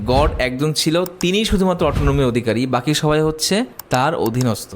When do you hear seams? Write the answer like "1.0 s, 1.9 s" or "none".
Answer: 3.8 s